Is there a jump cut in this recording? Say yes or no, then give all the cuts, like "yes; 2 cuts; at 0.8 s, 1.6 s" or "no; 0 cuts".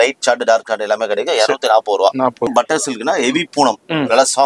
yes; 1 cut; at 2.5 s